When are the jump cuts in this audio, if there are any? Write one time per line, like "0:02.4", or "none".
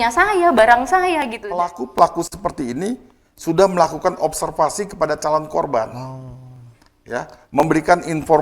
0:01.4